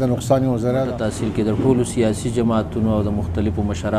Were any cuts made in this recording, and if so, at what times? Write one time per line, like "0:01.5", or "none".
0:00.9